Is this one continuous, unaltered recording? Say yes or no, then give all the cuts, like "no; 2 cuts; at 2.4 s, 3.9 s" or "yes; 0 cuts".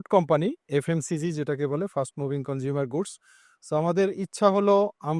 yes; 0 cuts